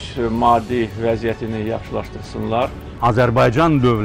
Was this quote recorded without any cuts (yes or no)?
no